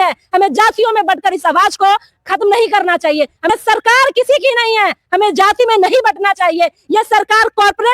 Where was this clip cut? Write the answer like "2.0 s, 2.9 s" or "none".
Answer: 3.5 s